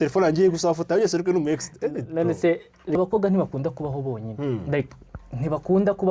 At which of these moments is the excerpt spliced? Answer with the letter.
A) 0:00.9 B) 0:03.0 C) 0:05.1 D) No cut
B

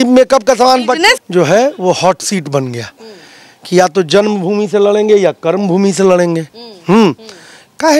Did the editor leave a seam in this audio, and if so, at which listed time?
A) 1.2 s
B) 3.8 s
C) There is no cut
A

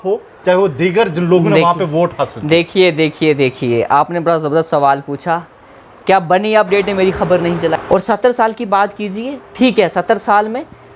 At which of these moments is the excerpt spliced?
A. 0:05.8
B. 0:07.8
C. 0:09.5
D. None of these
B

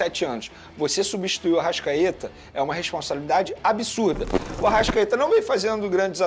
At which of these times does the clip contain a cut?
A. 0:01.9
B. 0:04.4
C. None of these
B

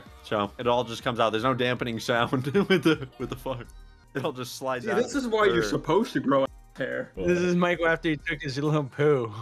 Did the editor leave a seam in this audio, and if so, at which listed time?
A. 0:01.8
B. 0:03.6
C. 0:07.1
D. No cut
C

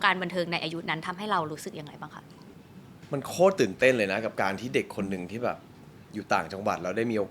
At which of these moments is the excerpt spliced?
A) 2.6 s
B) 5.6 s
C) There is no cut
A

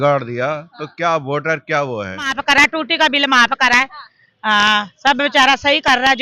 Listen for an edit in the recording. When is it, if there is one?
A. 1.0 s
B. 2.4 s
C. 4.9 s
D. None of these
B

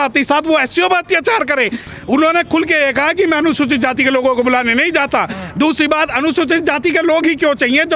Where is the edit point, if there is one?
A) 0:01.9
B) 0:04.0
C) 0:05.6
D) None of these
A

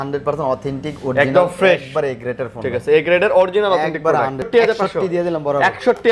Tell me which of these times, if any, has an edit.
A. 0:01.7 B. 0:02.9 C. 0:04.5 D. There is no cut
C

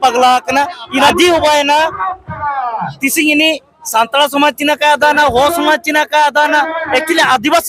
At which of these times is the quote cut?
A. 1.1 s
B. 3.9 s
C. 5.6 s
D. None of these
A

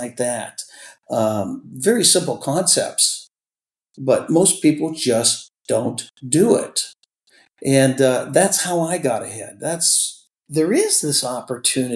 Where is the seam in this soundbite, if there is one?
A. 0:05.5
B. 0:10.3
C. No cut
B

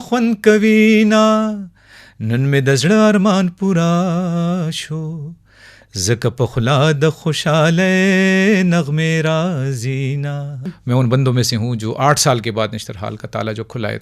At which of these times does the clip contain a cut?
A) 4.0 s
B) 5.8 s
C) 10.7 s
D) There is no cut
C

